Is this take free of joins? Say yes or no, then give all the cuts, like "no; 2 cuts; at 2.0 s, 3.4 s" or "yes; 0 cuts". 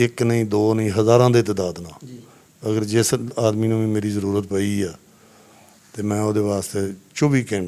yes; 0 cuts